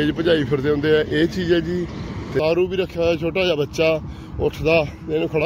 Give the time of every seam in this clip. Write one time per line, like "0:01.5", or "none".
0:02.3

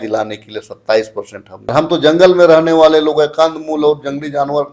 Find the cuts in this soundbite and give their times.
0:01.7

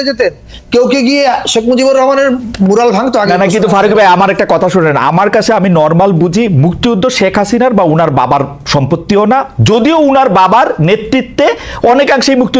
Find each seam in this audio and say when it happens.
none

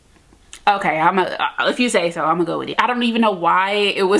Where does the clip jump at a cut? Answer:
0:02.7

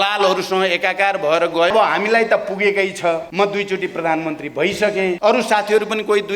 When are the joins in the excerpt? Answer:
0:01.7
0:03.3
0:05.2

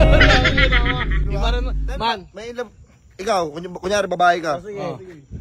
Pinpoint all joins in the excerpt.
none

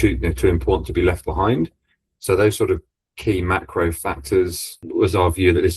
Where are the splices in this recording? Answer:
0:04.8

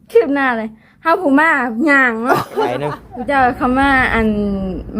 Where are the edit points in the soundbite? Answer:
0:03.1

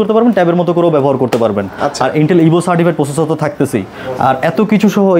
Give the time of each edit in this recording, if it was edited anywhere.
none

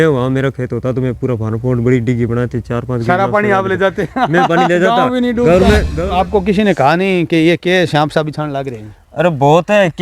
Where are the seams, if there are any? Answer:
0:05.9

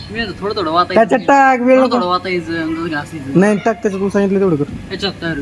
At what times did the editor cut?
none

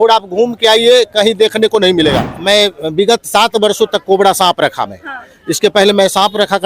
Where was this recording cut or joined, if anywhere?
0:02.3

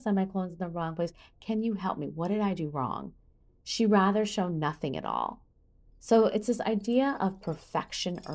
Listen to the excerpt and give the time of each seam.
none

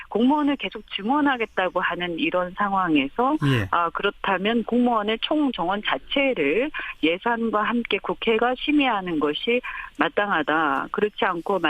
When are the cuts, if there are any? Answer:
0:05.8

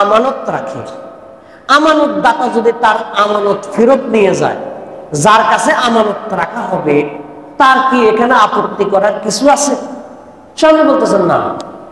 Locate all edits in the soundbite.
none

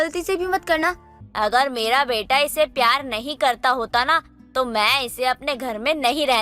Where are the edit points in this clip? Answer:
0:01.2

